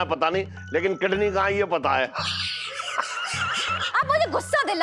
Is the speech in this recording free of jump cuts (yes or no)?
no